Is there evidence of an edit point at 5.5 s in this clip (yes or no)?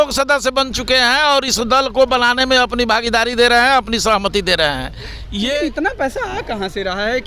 yes